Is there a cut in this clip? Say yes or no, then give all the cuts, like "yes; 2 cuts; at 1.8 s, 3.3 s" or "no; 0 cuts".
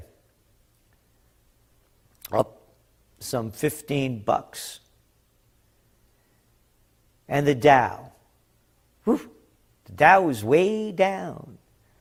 no; 0 cuts